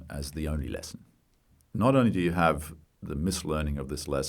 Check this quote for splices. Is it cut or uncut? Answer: cut